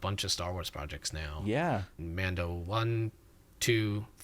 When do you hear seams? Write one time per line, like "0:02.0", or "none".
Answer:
0:01.9